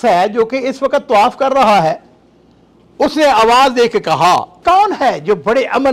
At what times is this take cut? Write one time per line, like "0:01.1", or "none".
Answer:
0:04.6